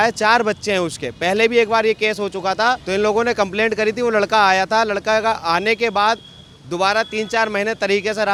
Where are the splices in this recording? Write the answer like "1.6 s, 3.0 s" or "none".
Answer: none